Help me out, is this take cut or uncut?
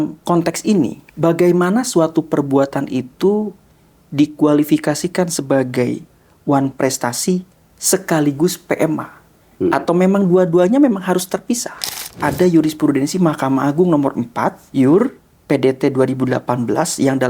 cut